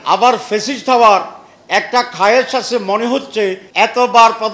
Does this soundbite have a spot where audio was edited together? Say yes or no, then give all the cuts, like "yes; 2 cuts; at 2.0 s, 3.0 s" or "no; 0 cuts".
yes; 1 cut; at 3.6 s